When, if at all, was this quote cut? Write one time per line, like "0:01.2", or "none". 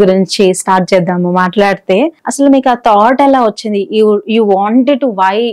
0:02.2